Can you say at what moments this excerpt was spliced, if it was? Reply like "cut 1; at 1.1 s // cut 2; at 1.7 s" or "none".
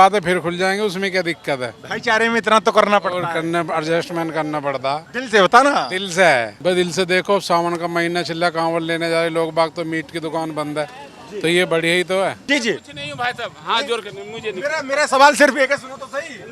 cut 1; at 5.1 s // cut 2; at 6.5 s // cut 3; at 12.4 s